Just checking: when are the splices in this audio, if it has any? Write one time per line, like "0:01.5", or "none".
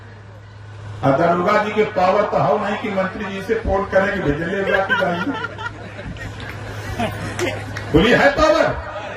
none